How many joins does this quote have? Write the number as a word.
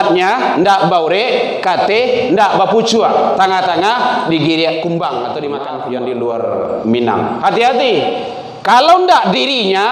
one